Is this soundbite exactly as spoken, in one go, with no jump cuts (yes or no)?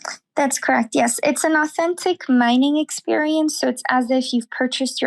yes